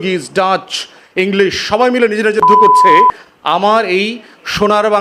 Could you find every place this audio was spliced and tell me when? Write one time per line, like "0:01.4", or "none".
0:02.4
0:03.3